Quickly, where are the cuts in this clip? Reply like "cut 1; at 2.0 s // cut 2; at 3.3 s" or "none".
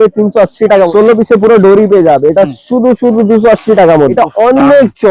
cut 1; at 0.9 s // cut 2; at 4.1 s